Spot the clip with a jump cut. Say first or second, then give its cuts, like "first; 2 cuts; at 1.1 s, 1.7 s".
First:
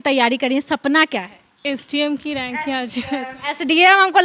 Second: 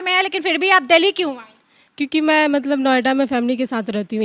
first; 1 cut; at 1.6 s